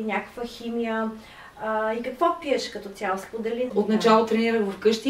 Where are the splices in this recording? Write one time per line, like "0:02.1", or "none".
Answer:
0:03.7